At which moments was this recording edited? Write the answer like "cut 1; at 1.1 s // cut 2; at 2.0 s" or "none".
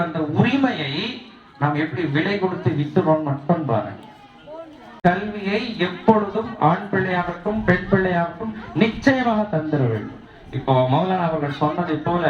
cut 1; at 5.0 s